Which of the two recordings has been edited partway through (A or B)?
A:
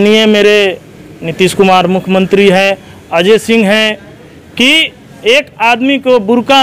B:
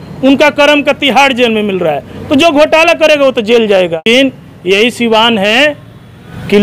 B